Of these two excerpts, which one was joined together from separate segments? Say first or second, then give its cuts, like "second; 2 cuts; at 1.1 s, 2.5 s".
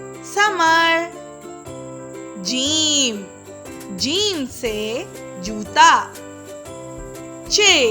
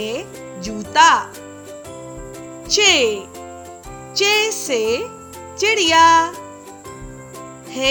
first; 2 cuts; at 1.1 s, 2.4 s